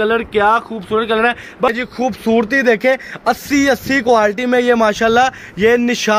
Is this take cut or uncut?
cut